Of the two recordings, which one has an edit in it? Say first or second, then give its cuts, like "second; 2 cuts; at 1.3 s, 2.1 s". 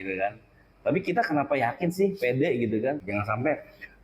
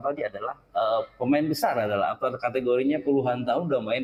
first; 1 cut; at 3.0 s